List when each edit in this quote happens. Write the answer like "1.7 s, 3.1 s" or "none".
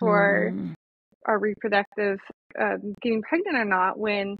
2.4 s